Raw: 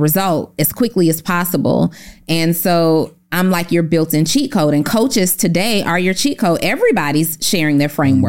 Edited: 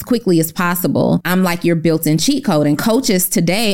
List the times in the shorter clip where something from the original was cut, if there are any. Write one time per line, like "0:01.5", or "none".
0:01.2